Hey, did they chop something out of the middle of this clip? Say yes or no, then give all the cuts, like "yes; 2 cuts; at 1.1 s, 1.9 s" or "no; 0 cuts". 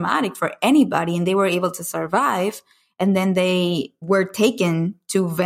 yes; 1 cut; at 3.9 s